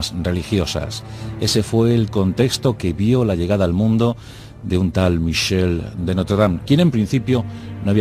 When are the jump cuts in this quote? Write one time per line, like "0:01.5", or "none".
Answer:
0:03.7